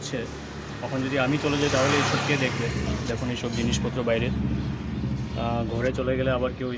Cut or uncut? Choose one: uncut